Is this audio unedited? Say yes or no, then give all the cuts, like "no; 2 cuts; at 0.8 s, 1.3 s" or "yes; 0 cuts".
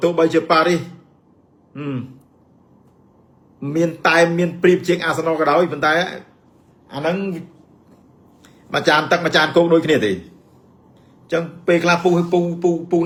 yes; 0 cuts